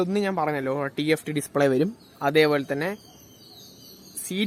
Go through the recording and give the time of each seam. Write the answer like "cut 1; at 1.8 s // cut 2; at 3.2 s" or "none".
none